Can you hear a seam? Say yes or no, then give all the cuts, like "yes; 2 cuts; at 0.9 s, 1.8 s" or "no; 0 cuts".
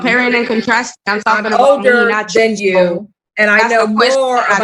no; 0 cuts